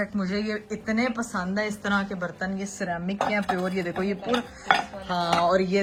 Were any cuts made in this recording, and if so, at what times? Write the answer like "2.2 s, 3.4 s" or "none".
none